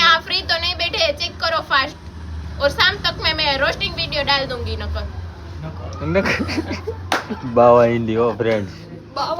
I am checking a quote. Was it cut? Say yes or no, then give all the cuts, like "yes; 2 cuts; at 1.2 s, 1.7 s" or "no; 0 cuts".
no; 0 cuts